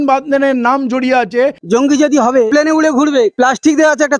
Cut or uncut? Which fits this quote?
cut